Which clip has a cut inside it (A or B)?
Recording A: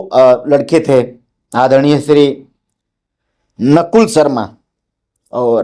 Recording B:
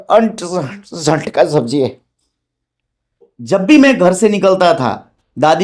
B